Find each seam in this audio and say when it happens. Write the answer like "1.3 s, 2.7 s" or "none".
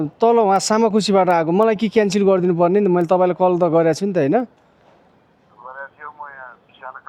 none